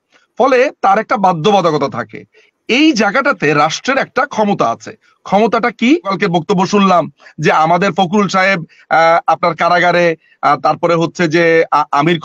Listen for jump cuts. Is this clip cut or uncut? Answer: cut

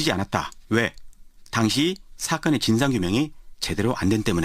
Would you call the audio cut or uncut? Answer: cut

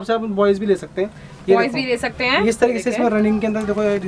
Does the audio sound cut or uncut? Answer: uncut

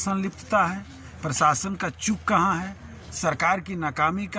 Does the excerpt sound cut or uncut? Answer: uncut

